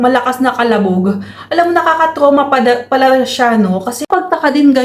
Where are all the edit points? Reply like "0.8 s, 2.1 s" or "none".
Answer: 3.9 s